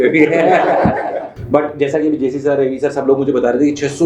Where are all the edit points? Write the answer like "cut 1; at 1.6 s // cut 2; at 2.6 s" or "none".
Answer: cut 1; at 1.3 s